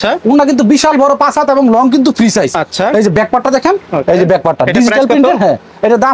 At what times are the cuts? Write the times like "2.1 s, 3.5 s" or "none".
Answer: none